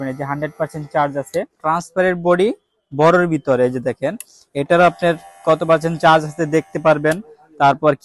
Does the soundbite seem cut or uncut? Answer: cut